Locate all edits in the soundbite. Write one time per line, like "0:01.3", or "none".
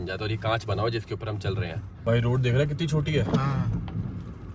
0:02.1